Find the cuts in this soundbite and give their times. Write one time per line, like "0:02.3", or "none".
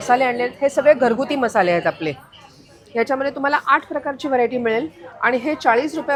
none